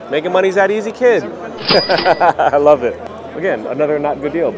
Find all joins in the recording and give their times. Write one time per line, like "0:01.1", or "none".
none